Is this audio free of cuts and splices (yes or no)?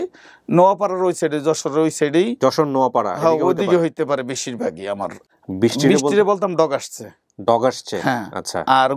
no